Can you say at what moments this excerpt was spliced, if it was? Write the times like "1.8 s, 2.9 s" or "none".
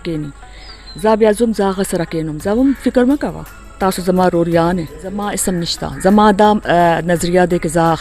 5.4 s